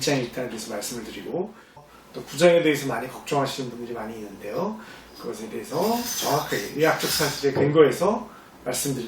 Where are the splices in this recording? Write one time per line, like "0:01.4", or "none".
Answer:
0:01.9